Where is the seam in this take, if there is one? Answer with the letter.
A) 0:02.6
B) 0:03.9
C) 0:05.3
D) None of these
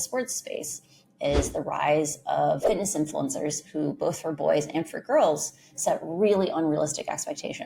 A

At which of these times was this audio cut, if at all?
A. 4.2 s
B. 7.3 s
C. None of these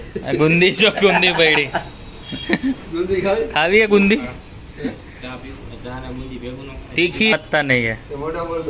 B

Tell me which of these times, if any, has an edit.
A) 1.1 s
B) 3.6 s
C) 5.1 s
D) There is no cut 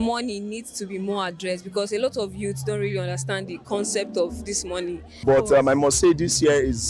C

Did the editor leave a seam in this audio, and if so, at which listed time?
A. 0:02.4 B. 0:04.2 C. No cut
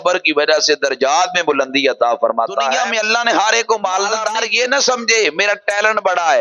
B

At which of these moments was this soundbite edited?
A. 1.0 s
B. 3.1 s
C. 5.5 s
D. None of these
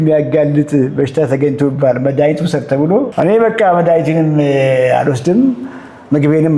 B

